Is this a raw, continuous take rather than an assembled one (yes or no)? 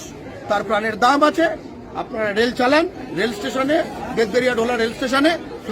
no